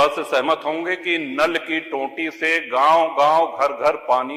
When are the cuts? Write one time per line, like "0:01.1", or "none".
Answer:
none